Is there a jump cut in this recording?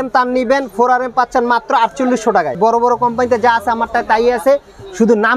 yes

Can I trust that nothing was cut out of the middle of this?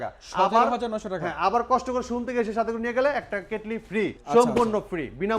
no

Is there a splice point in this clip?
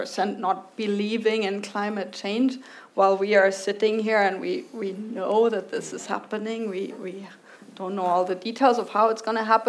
no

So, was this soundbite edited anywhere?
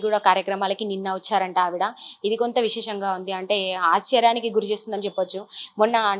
no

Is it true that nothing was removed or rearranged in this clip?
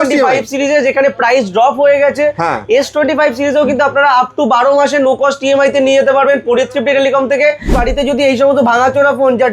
no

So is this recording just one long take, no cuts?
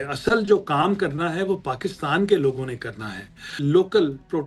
no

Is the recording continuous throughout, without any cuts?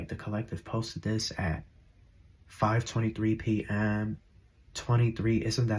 yes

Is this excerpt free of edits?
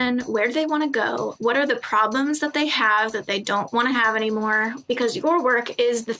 no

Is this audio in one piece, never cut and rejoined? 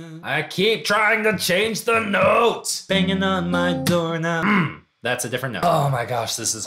no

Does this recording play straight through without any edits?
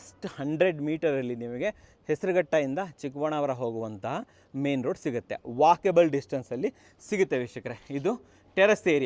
yes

